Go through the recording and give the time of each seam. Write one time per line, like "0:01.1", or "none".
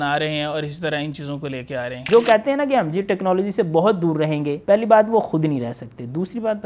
0:02.0
0:04.5